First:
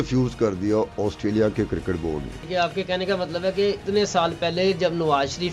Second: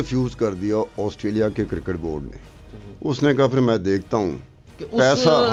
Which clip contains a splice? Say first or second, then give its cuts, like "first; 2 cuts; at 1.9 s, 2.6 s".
first; 2 cuts; at 2.4 s, 3.8 s